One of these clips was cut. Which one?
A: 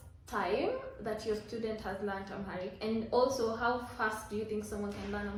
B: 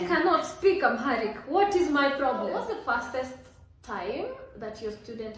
B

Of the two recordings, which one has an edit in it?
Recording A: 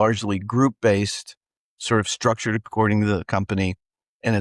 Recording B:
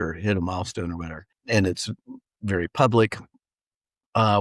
B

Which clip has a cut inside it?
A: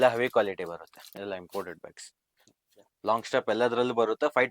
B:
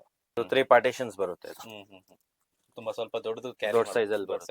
A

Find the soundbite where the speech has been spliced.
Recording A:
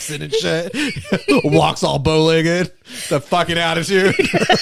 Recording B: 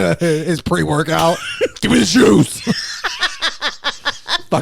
B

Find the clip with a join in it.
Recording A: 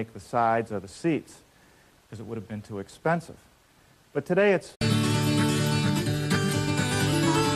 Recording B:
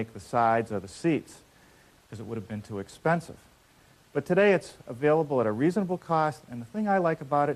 B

